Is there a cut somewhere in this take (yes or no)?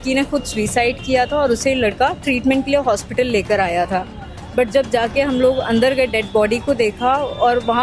no